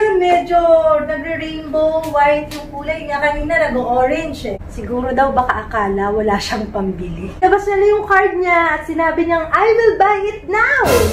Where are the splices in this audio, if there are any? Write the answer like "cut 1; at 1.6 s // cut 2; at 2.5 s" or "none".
cut 1; at 4.6 s // cut 2; at 7.4 s